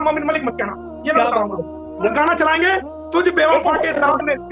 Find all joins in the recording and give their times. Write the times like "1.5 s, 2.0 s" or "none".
none